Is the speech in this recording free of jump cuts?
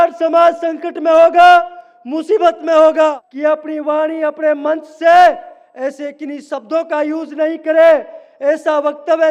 no; 1 cut; at 3.3 s

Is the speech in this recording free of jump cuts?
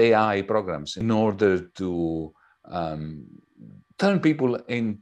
no; 1 cut; at 0.9 s

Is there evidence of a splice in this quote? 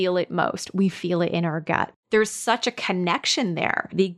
yes; 1 cut; at 2.0 s

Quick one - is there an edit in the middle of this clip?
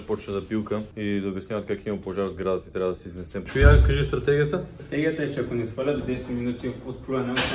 yes; 2 cuts; at 0.9 s, 3.4 s

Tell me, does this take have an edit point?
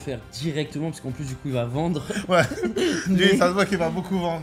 no; 0 cuts

